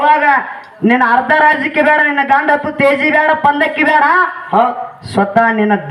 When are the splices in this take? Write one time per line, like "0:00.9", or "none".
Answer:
none